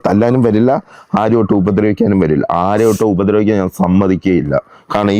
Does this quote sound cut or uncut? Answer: uncut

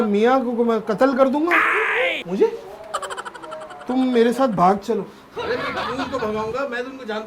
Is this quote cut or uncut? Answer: uncut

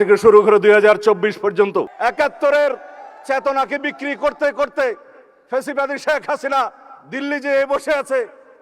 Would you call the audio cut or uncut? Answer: cut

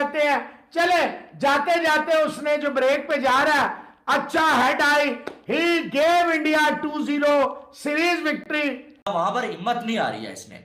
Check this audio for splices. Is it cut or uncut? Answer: cut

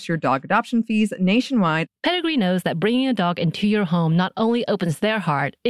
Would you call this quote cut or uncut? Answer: cut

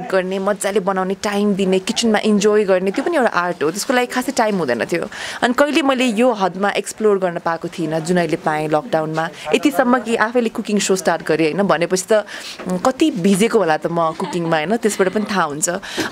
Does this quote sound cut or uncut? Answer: uncut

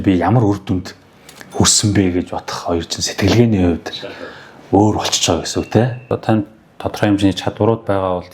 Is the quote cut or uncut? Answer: cut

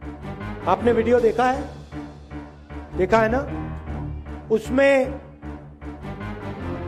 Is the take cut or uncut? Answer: uncut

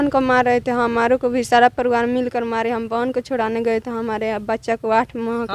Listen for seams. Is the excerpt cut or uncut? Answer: uncut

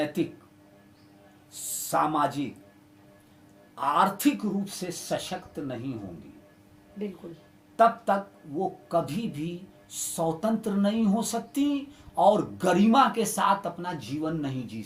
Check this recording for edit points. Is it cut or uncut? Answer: uncut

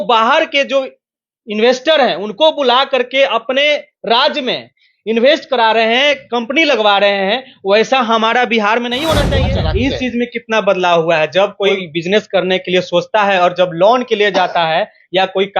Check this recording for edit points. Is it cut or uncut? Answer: cut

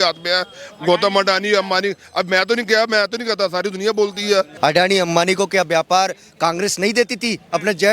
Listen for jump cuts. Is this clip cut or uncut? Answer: cut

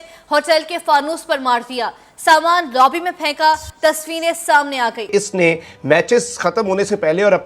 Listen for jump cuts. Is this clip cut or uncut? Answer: cut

